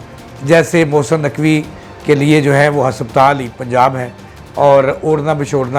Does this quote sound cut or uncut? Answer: uncut